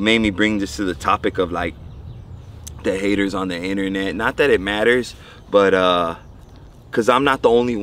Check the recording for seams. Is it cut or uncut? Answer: uncut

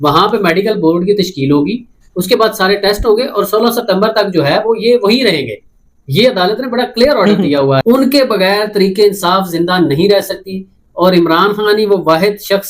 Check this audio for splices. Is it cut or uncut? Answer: cut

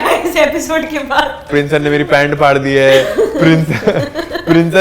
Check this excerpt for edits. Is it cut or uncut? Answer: cut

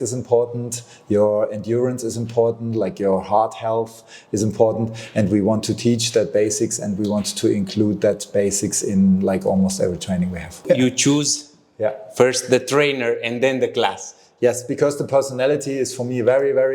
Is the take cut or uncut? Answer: cut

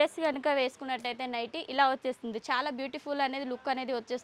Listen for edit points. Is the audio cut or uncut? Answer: uncut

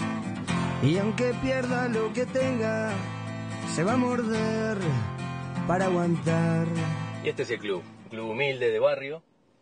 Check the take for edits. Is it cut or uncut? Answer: uncut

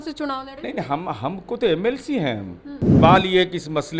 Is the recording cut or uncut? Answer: cut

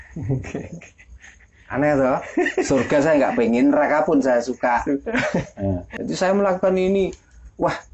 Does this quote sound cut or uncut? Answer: cut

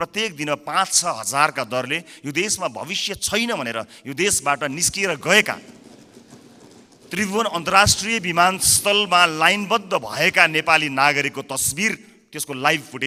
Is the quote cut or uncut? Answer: uncut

